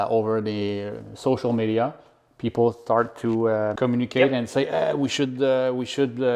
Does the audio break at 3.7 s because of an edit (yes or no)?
yes